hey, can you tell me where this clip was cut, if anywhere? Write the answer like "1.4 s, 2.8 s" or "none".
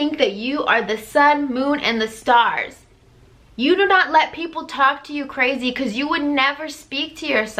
none